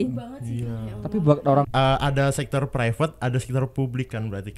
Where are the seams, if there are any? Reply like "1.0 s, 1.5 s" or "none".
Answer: 1.7 s